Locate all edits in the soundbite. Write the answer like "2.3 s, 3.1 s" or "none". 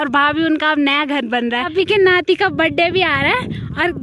1.7 s